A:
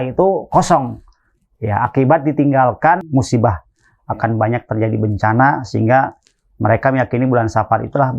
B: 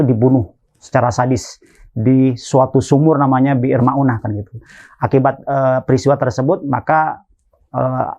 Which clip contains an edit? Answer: A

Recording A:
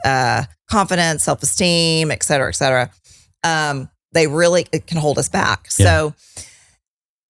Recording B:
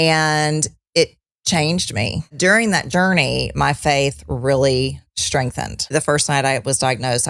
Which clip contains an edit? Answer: B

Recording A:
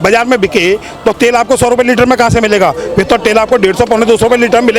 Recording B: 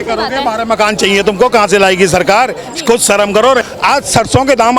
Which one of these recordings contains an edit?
B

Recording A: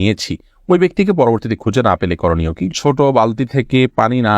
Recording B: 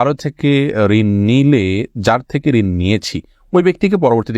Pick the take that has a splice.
A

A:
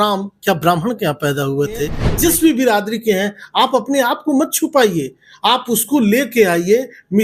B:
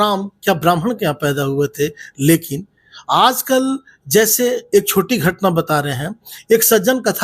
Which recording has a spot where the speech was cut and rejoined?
A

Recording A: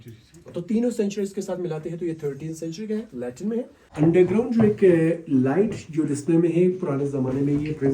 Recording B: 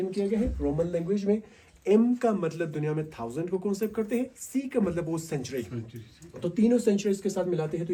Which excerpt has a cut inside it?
A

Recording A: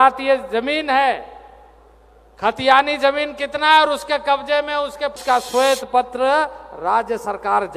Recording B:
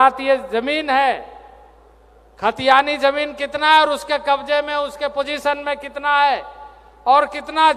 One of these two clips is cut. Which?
A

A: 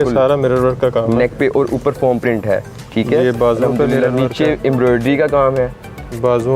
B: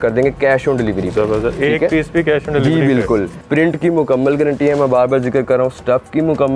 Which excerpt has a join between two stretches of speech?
B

